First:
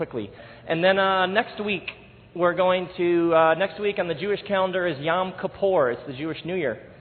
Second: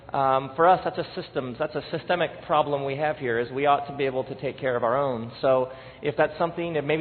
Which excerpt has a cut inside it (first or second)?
second